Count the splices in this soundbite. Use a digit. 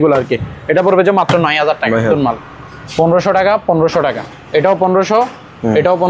1